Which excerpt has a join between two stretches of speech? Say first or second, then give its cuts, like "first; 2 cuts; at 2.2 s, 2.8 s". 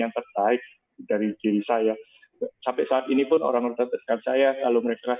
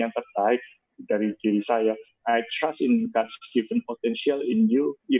second; 1 cut; at 2.1 s